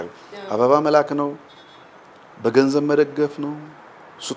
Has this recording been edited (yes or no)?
no